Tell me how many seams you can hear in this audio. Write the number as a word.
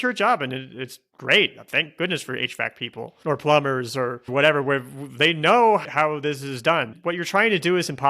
one